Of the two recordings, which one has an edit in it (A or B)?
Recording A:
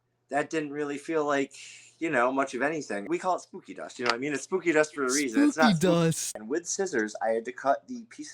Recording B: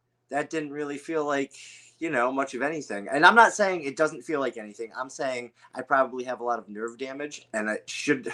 A